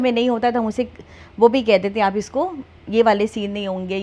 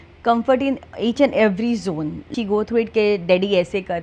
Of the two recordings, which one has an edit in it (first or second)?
second